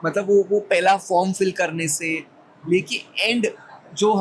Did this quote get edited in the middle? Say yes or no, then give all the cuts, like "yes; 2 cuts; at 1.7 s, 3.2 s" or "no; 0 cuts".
no; 0 cuts